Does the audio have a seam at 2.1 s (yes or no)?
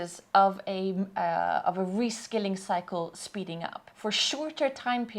no